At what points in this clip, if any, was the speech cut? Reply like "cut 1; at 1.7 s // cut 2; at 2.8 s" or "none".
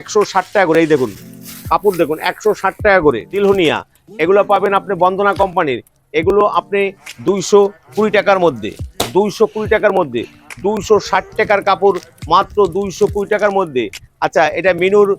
cut 1; at 3.4 s

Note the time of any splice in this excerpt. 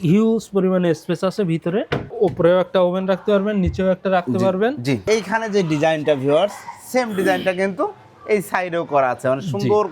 cut 1; at 2.1 s // cut 2; at 5.0 s

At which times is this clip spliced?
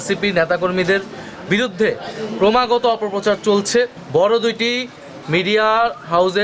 cut 1; at 4.0 s

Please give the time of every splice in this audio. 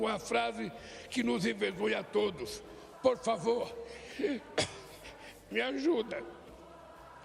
none

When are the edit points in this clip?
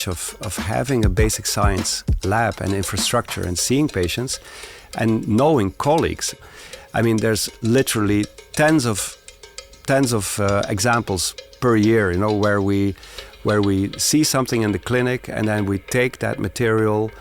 cut 1; at 6.4 s

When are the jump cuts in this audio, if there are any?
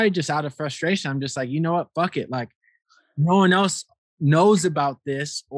none

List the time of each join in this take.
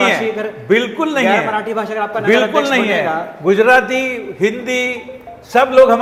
none

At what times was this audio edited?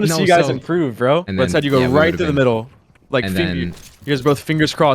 cut 1; at 1.2 s

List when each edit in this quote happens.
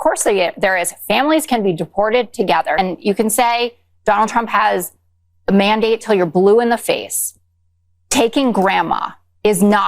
cut 1; at 2.8 s

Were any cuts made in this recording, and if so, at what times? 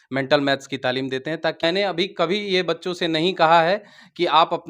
cut 1; at 1.6 s

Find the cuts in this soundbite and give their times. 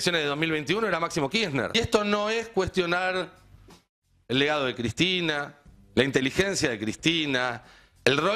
cut 1; at 1.7 s

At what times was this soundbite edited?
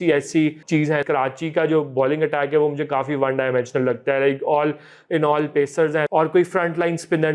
cut 1; at 0.9 s // cut 2; at 6.1 s

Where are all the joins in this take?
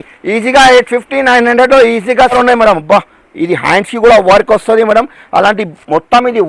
cut 1; at 2.3 s

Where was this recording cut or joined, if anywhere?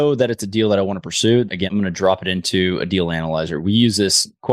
cut 1; at 1.6 s

